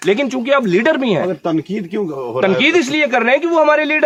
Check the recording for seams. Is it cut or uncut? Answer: uncut